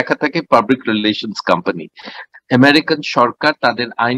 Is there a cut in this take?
yes; 1 cut; at 2.2 s

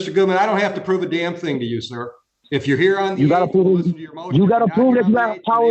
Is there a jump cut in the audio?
no; 0 cuts

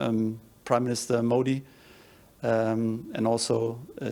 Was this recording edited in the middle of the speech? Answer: no; 0 cuts

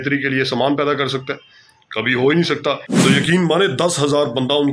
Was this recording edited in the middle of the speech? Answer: yes; 1 cut; at 2.9 s

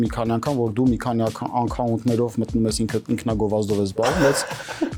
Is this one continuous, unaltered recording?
yes; 0 cuts

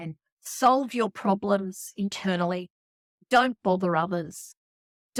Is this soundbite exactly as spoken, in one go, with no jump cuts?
yes; 0 cuts

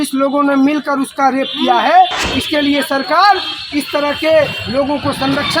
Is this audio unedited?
no; 1 cut; at 2.2 s

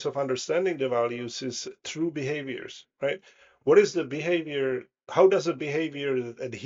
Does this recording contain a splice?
no; 0 cuts

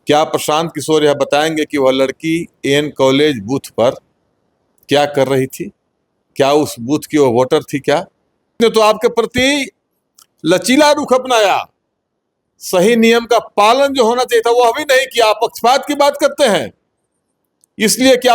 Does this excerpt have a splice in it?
yes; 1 cut; at 8.6 s

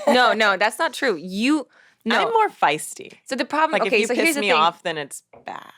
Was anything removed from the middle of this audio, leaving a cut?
no; 0 cuts

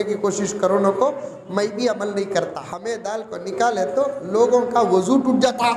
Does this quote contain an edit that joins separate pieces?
yes; 1 cut; at 2.7 s

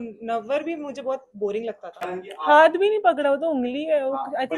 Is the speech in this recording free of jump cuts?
no; 1 cut; at 2.1 s

